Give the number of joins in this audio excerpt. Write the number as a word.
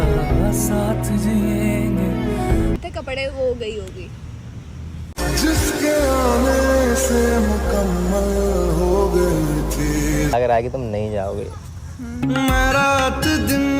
two